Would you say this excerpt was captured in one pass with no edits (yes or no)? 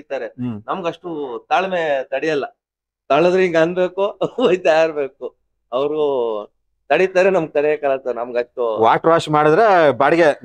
yes